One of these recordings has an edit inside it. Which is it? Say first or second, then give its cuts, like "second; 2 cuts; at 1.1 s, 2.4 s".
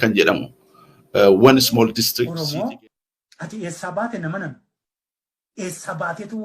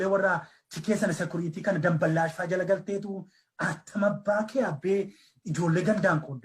first; 1 cut; at 2.0 s